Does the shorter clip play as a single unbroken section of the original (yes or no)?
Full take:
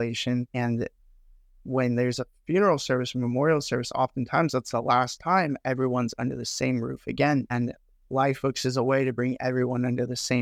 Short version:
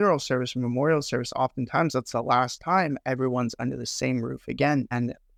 yes